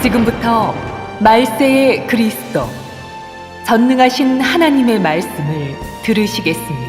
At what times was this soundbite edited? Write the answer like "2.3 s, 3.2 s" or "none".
5.7 s